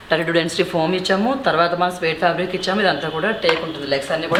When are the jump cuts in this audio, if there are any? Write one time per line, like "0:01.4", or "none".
none